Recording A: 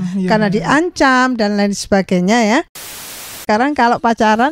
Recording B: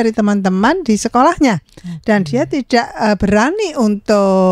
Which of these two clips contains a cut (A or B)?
A